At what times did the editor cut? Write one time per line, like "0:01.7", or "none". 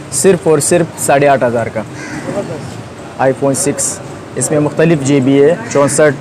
none

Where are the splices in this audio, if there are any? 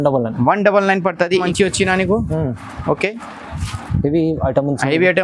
0:01.4

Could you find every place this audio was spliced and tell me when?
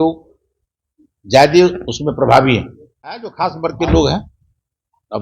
0:03.3

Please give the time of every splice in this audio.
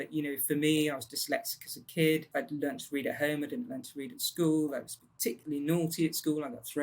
0:02.3

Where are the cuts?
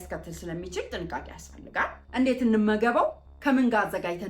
0:02.0

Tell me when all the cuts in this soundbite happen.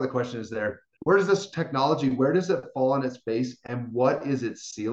0:01.0

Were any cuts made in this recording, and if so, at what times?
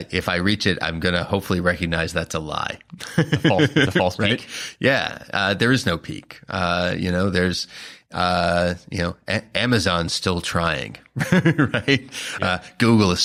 none

